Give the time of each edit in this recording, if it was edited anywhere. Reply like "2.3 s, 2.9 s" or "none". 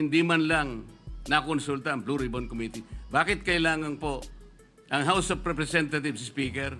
none